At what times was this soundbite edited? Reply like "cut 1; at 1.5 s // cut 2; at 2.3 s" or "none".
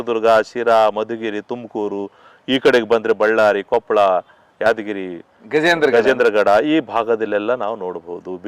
none